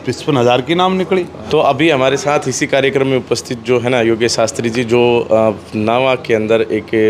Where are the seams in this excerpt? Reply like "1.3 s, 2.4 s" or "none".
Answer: none